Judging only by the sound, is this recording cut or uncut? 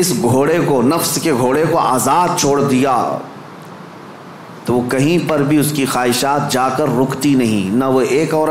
uncut